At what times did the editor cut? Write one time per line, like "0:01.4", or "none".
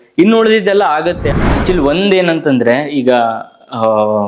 0:01.2